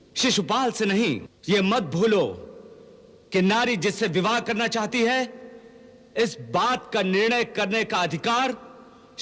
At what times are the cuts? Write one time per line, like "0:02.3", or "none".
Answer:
0:01.3